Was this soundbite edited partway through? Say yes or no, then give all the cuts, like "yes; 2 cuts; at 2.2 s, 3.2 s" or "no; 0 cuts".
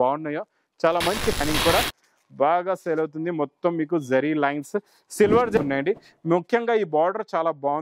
yes; 2 cuts; at 1.4 s, 5.6 s